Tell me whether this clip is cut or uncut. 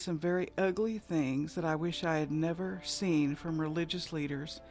uncut